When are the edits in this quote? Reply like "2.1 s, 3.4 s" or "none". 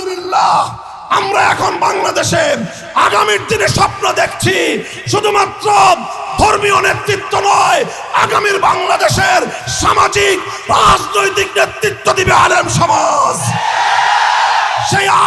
none